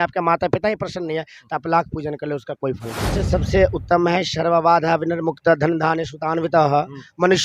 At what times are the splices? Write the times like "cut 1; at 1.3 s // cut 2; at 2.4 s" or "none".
cut 1; at 3.2 s